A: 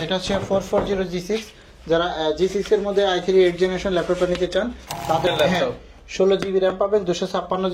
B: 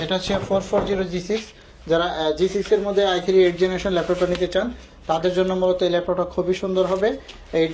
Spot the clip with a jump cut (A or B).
A